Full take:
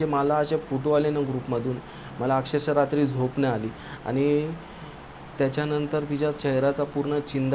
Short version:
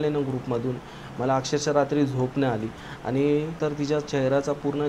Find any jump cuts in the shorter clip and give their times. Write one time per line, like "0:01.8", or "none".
0:03.6